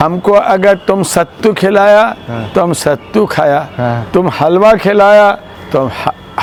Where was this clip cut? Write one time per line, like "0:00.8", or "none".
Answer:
none